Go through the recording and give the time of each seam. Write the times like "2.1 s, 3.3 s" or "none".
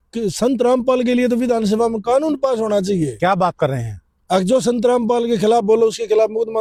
none